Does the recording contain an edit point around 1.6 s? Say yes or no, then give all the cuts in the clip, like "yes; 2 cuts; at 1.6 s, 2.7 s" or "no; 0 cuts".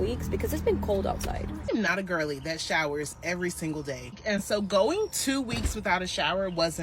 yes; 2 cuts; at 1.6 s, 4.2 s